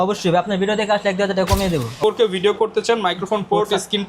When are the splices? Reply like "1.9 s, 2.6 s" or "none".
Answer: 2.0 s